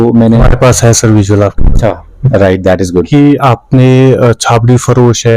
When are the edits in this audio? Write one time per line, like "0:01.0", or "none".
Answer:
0:03.1